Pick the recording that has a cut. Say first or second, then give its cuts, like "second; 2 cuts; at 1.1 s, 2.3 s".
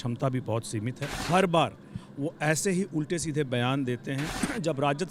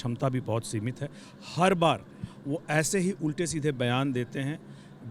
first; 2 cuts; at 1.1 s, 4.3 s